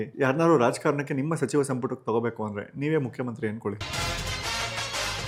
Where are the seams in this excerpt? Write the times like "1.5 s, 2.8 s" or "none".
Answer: none